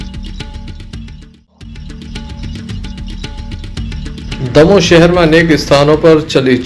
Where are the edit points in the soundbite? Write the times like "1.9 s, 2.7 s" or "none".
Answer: 2.0 s